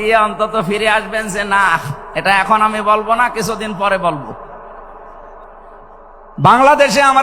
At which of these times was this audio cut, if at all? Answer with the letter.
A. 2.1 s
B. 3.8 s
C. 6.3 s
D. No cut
C